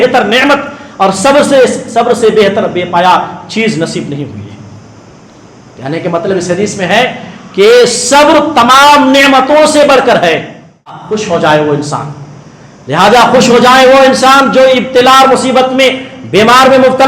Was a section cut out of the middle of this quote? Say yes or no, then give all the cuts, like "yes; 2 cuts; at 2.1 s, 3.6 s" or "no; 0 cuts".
yes; 1 cut; at 11.1 s